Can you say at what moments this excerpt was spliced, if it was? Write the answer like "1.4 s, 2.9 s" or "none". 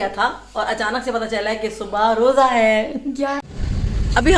3.3 s